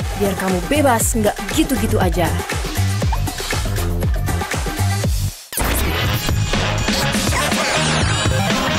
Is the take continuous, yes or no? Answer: yes